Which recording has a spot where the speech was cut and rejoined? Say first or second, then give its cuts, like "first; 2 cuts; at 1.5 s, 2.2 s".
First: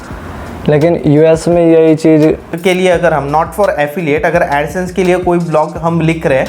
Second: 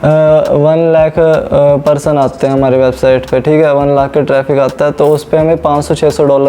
first; 1 cut; at 2.5 s